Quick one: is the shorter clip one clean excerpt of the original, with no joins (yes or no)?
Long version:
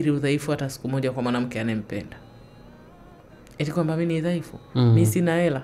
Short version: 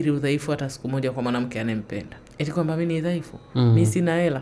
no